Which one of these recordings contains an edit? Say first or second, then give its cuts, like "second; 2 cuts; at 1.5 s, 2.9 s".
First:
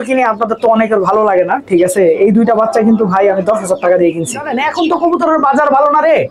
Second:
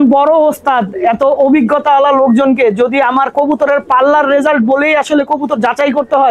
first; 1 cut; at 4.5 s